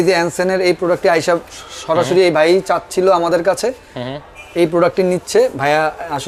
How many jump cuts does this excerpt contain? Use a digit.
0